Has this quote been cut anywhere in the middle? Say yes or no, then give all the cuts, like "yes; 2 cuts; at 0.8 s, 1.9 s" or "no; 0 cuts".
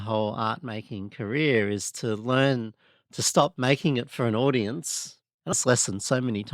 yes; 1 cut; at 5.6 s